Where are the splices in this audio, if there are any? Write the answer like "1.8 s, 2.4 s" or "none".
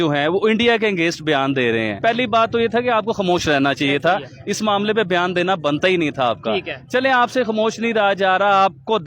2.0 s